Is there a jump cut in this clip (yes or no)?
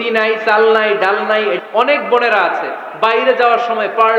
yes